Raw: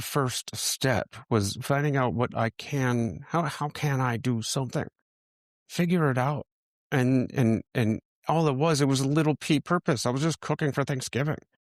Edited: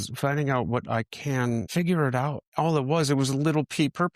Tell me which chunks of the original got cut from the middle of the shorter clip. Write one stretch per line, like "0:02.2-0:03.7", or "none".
0:03.1-0:05.7
0:06.4-0:08.1